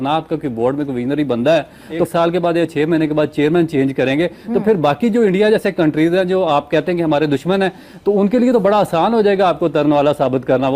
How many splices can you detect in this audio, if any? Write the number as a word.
one